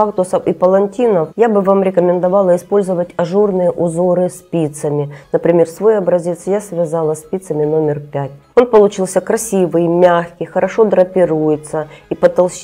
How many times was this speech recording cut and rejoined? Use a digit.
0